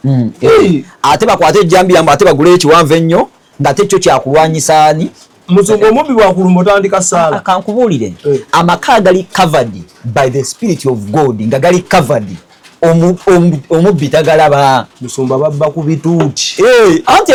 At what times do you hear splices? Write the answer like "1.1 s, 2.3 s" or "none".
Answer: none